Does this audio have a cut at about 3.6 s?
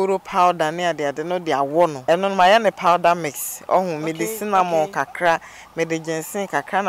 no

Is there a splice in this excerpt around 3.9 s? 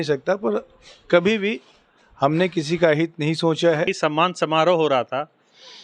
yes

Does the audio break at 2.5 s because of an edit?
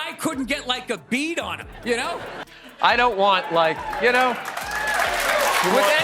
yes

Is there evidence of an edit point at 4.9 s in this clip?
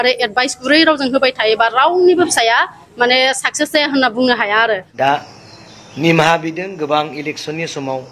yes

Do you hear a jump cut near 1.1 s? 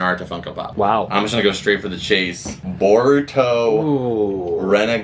yes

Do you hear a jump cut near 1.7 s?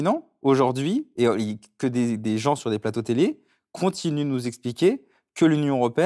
no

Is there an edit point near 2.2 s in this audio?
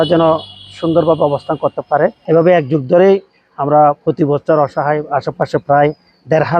yes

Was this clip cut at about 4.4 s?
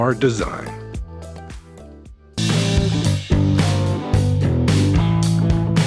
no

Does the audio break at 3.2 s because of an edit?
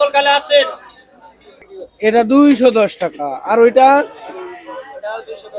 no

